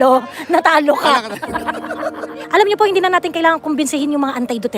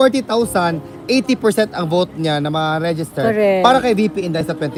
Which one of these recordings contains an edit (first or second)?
first